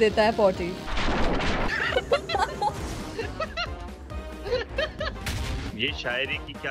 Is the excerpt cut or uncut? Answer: cut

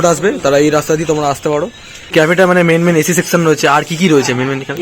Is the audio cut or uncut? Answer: cut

